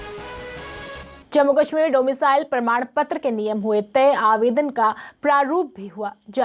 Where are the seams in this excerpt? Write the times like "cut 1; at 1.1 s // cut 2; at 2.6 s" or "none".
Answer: cut 1; at 1.2 s

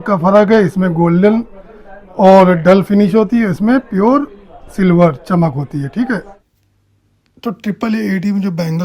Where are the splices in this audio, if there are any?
cut 1; at 3.1 s

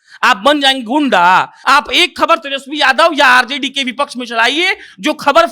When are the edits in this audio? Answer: cut 1; at 1.5 s

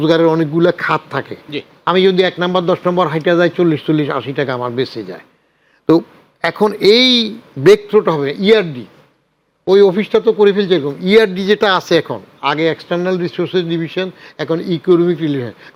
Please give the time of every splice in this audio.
none

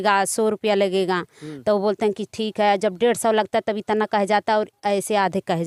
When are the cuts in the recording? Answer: none

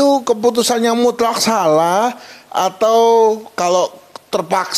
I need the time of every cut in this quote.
none

